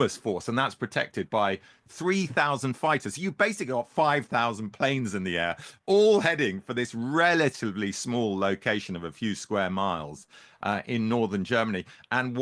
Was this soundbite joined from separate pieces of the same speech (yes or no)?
no